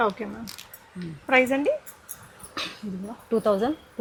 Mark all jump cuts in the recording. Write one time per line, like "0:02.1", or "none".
none